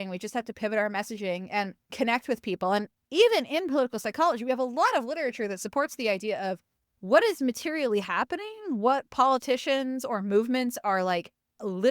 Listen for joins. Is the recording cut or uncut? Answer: cut